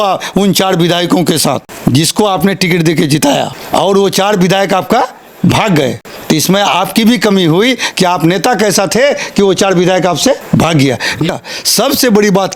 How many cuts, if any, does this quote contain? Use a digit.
5